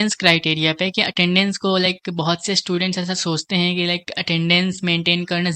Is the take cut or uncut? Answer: uncut